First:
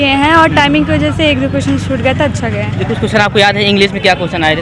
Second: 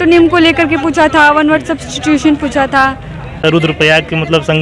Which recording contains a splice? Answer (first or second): second